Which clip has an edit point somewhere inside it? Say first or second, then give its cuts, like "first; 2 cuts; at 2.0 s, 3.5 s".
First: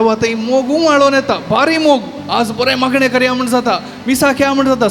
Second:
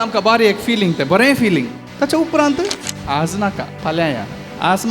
second; 3 cuts; at 1.8 s, 2.9 s, 3.7 s